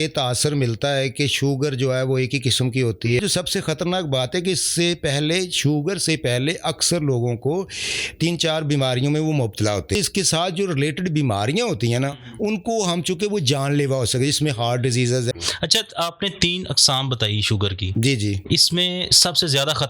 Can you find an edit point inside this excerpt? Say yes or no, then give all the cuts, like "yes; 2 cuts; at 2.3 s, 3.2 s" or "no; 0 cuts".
yes; 3 cuts; at 3.2 s, 10.0 s, 15.3 s